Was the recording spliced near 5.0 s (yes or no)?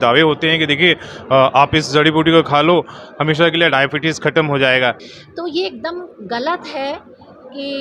yes